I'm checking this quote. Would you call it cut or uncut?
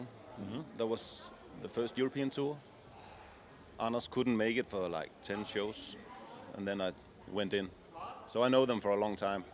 uncut